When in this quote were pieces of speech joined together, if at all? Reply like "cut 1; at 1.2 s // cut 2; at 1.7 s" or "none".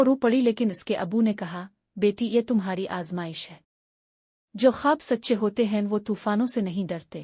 none